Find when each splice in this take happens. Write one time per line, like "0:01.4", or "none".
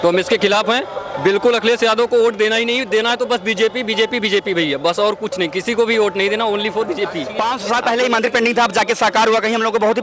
0:07.2